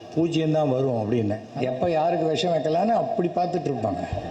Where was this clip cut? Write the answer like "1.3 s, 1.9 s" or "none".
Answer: 1.5 s